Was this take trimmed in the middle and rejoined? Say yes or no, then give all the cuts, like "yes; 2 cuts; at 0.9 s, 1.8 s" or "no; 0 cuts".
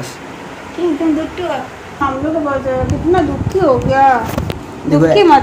yes; 1 cut; at 2.0 s